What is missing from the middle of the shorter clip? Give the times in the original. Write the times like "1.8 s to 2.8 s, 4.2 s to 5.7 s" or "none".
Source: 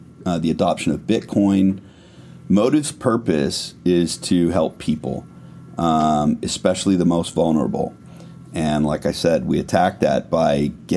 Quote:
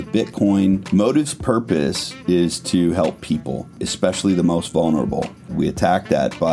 1.8 s to 2.4 s, 5.4 s to 6.5 s, 8.1 s to 9.4 s